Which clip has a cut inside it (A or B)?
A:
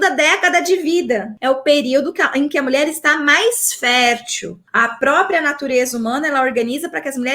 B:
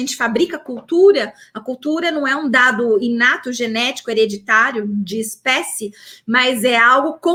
A